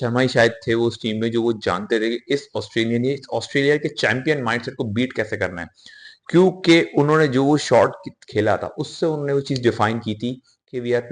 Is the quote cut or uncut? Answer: uncut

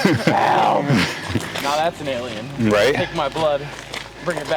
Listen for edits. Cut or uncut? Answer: uncut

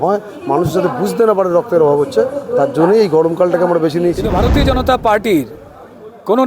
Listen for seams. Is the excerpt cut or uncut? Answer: cut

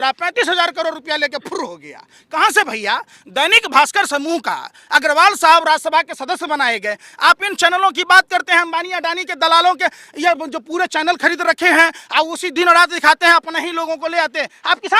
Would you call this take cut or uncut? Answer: uncut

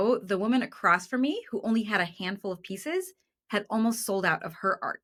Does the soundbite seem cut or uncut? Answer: uncut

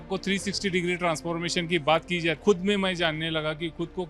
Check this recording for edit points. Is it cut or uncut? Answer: cut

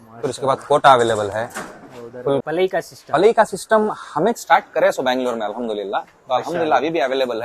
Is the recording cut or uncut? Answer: cut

